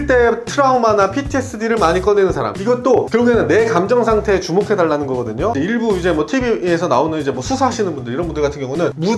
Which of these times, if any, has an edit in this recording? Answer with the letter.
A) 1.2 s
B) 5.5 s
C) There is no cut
B